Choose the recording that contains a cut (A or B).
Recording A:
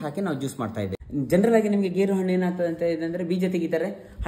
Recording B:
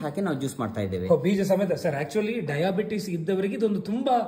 A